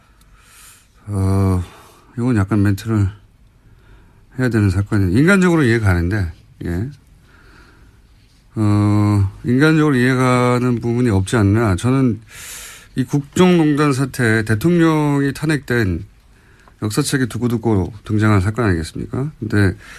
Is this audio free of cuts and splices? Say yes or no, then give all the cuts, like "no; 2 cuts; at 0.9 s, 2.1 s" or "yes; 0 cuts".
no; 1 cut; at 6.7 s